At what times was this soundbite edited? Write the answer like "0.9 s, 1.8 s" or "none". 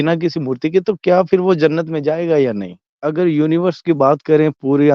2.9 s